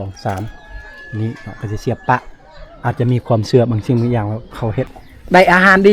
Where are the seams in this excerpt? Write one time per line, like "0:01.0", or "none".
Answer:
0:04.9